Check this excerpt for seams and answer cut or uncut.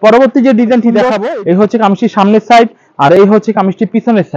cut